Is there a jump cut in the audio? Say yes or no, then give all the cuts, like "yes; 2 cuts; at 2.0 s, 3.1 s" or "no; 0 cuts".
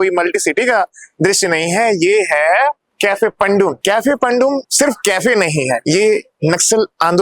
yes; 4 cuts; at 2.9 s, 3.8 s, 4.7 s, 5.8 s